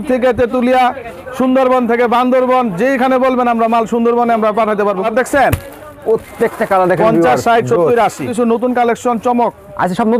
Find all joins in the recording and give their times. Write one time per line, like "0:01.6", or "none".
0:05.1
0:08.3

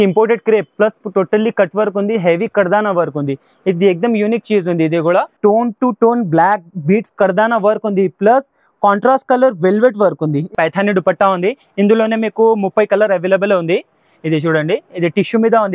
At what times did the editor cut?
0:05.3
0:10.5

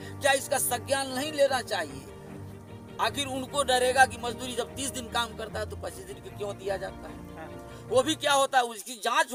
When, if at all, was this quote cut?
none

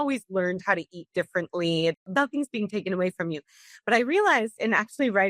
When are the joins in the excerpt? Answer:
0:02.1

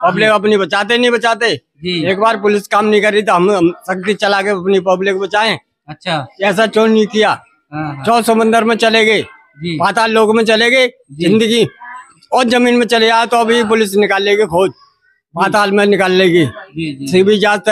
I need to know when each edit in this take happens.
none

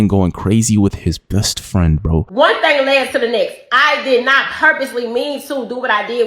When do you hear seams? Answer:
0:02.3

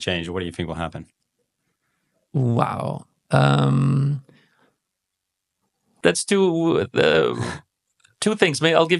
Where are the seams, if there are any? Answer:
0:06.0

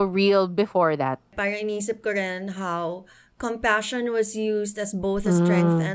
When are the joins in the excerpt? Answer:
0:01.3

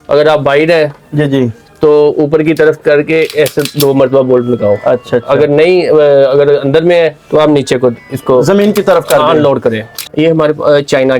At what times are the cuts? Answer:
0:09.9

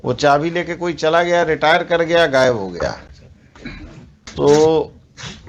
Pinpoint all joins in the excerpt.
0:04.3

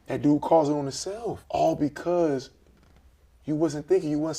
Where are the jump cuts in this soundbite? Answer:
0:01.4

